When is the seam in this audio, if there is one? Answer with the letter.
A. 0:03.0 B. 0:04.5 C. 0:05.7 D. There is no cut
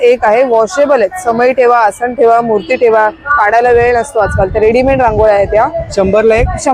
D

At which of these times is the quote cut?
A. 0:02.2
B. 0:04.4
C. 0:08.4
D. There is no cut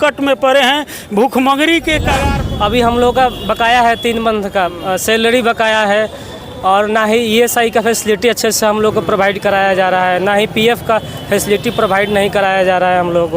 A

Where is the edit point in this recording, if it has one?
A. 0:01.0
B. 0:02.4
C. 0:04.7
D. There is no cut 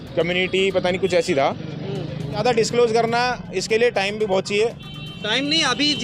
B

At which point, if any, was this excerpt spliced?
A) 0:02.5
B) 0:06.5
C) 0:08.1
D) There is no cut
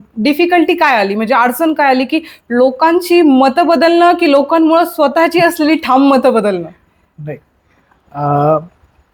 D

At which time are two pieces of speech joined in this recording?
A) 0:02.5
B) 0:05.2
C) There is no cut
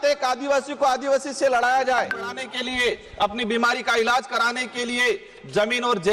A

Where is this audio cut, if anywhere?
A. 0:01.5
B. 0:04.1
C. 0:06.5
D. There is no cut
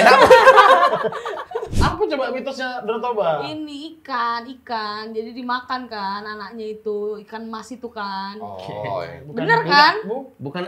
A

